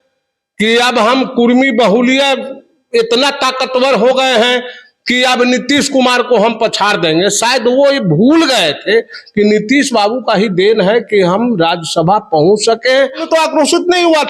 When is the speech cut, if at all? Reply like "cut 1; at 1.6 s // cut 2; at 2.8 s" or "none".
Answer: cut 1; at 13.3 s